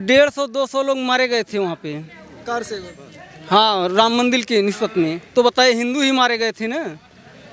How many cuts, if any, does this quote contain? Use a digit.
0